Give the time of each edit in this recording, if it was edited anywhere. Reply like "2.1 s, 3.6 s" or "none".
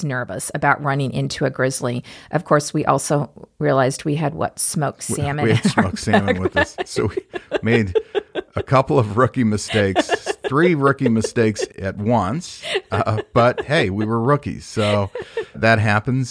11.7 s, 15.6 s